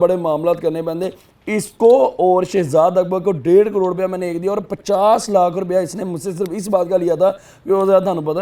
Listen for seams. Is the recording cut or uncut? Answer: uncut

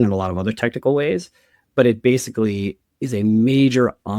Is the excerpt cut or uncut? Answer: uncut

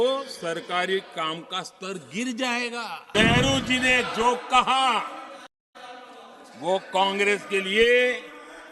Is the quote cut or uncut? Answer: cut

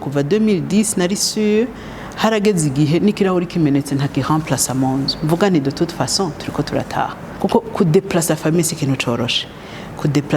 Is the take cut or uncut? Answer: cut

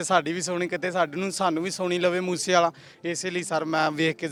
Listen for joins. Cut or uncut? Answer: uncut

